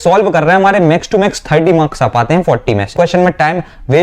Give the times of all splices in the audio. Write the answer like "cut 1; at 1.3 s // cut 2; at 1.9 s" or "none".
cut 1; at 2.9 s